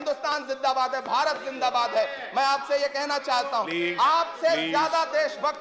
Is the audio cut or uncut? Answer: uncut